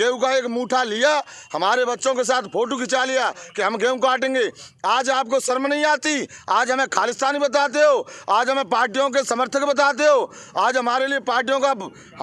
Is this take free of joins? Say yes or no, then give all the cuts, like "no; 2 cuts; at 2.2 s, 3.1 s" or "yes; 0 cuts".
yes; 0 cuts